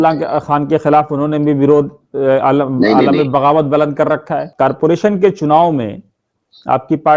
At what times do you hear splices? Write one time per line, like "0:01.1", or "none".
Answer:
0:04.5